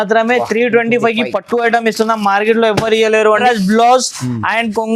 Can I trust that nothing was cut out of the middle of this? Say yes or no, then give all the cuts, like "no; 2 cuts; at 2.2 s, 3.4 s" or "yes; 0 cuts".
no; 1 cut; at 3.4 s